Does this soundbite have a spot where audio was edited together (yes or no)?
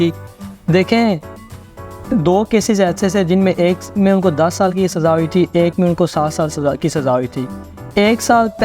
no